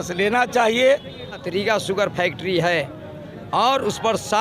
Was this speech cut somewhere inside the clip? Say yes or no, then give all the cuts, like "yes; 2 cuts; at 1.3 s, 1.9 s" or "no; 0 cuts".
yes; 1 cut; at 1.4 s